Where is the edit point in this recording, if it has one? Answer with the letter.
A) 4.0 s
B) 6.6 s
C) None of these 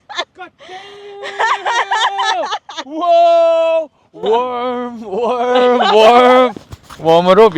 A